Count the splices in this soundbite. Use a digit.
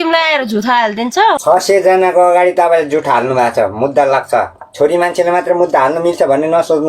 1